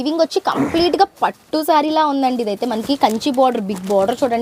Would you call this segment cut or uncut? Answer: uncut